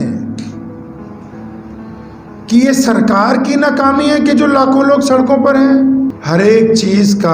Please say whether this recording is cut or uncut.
cut